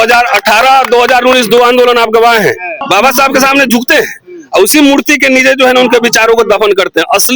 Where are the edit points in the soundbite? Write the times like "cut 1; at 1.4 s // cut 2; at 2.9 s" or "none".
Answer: cut 1; at 2.8 s